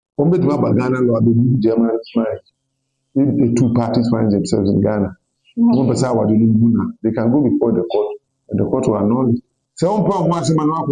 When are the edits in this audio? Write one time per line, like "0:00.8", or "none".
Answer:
0:09.6